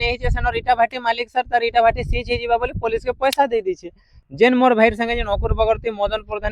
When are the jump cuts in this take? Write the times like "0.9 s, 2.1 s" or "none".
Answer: 4.2 s